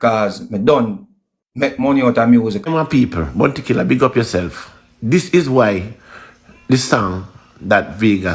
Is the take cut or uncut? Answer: cut